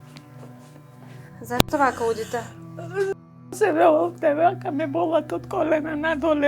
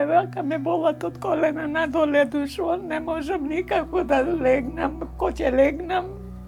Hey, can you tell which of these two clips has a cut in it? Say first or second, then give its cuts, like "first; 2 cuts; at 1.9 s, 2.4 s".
first; 1 cut; at 1.4 s